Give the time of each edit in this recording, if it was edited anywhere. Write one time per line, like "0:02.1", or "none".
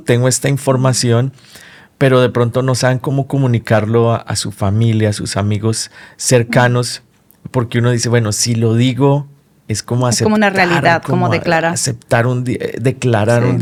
none